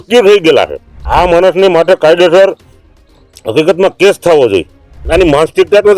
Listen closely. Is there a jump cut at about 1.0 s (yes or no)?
yes